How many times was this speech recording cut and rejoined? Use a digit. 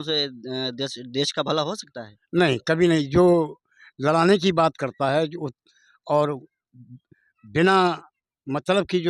0